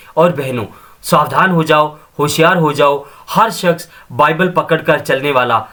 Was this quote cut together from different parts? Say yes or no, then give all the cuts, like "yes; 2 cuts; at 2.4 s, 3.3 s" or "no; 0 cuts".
no; 0 cuts